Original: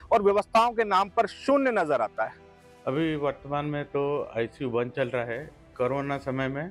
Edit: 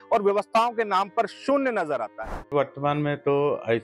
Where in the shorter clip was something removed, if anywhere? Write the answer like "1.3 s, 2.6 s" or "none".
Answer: 2.5 s